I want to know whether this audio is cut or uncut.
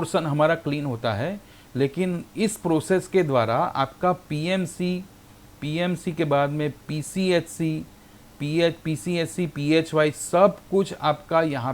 uncut